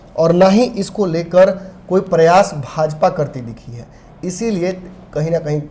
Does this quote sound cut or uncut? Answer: uncut